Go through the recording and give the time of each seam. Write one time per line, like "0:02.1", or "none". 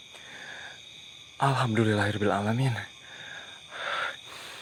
none